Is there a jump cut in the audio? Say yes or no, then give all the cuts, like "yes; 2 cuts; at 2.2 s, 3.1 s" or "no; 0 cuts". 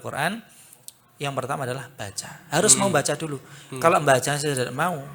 no; 0 cuts